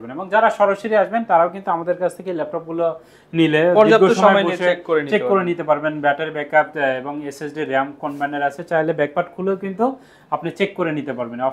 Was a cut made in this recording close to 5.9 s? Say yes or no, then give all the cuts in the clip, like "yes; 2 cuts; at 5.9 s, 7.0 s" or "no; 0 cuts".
no; 0 cuts